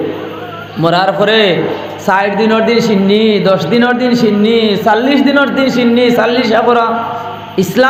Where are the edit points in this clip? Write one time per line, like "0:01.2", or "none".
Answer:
none